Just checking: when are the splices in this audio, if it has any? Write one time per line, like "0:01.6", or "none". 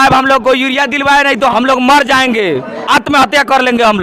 0:01.5